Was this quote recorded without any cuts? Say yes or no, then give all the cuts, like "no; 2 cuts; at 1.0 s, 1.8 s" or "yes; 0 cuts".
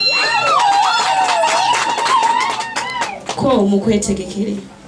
yes; 0 cuts